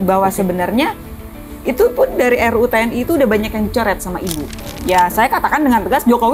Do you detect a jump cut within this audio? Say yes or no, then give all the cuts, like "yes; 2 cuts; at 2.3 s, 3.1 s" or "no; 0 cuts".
yes; 1 cut; at 4.5 s